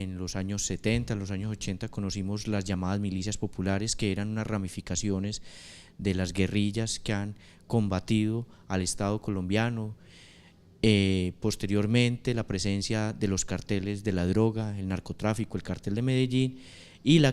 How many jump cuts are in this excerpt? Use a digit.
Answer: 1